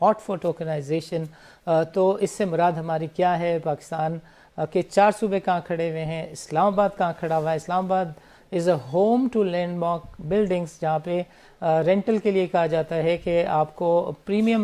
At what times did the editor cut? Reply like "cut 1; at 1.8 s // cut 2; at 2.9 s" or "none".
none

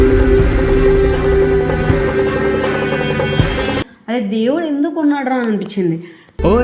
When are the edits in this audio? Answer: cut 1; at 3.9 s

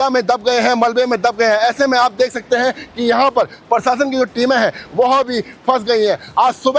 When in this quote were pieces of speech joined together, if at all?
none

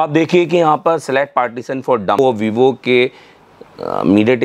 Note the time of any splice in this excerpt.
cut 1; at 2.2 s

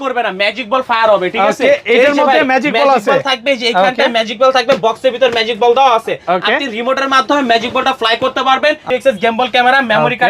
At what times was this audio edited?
cut 1; at 8.8 s

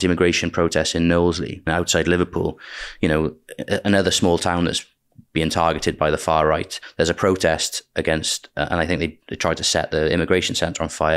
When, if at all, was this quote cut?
cut 1; at 1.7 s // cut 2; at 6.8 s

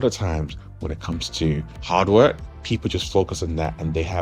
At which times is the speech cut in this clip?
cut 1; at 1.7 s // cut 2; at 2.5 s

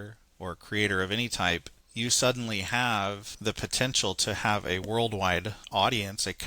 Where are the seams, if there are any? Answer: cut 1; at 1.8 s // cut 2; at 3.3 s // cut 3; at 5.6 s

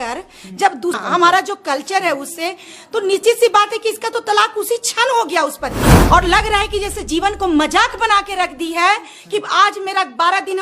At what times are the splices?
cut 1; at 1.0 s // cut 2; at 6.0 s

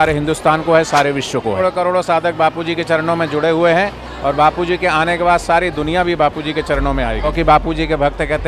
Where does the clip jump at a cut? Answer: cut 1; at 1.6 s // cut 2; at 7.3 s

